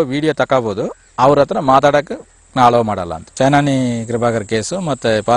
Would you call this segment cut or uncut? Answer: cut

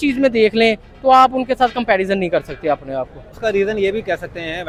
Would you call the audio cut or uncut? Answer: uncut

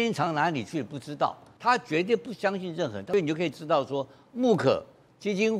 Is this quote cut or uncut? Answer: cut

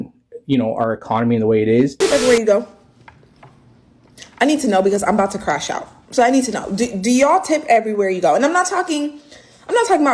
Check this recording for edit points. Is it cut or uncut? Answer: cut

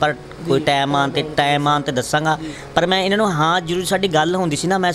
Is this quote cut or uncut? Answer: uncut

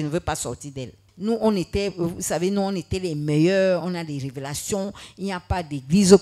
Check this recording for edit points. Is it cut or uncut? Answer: cut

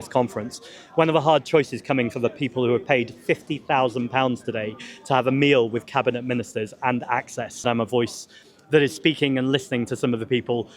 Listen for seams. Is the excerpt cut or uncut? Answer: cut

